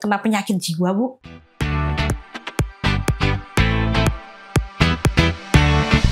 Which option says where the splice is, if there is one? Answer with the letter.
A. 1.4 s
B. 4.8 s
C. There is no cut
C